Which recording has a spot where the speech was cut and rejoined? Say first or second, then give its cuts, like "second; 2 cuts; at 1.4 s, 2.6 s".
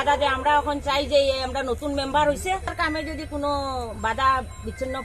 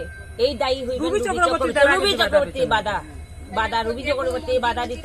first; 1 cut; at 2.7 s